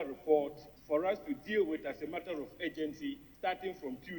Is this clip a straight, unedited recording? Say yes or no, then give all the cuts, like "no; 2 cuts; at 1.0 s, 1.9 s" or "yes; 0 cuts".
no; 1 cut; at 3.3 s